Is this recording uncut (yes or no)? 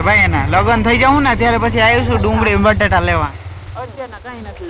yes